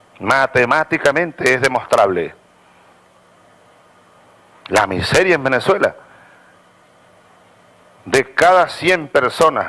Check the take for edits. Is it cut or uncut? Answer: uncut